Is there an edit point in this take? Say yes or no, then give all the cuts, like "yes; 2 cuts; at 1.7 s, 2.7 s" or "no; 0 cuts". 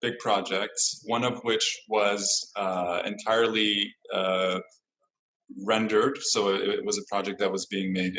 no; 0 cuts